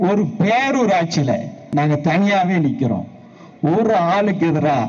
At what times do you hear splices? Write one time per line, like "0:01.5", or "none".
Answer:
0:01.7